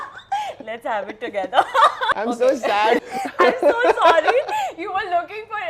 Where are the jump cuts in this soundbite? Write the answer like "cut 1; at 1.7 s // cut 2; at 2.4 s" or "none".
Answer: cut 1; at 2.1 s // cut 2; at 3.0 s